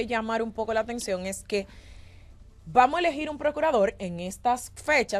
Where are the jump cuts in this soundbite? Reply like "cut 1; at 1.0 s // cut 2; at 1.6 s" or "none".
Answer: none

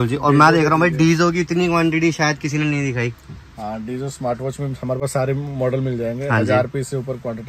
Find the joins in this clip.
none

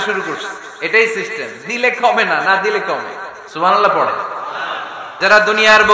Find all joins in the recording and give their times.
cut 1; at 5.0 s

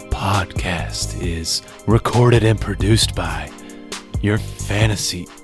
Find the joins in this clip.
none

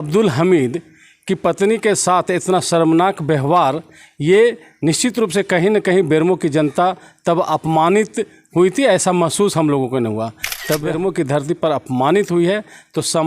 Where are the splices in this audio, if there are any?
cut 1; at 10.9 s

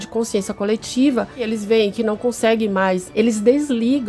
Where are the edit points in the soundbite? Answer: cut 1; at 1.4 s // cut 2; at 3.1 s

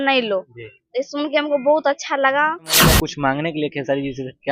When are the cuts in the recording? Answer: cut 1; at 3.0 s

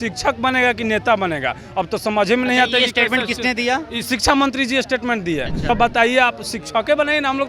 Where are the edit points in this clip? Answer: cut 1; at 5.7 s

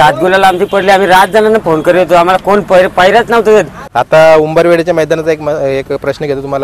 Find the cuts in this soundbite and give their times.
cut 1; at 3.8 s

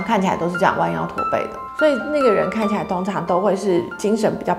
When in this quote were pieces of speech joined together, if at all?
none

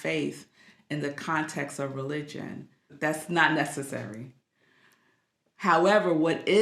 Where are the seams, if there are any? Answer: cut 1; at 2.9 s

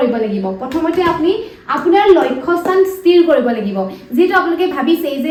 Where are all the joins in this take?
none

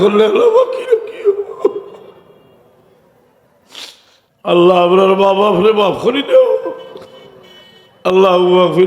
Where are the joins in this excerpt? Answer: cut 1; at 4.2 s

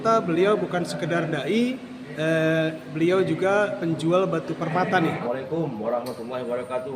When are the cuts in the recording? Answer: cut 1; at 5.2 s

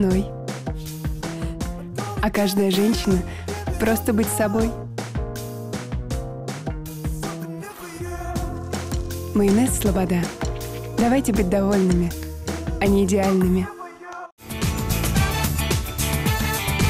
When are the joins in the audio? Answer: none

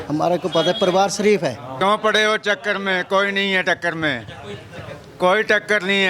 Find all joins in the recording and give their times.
cut 1; at 1.7 s

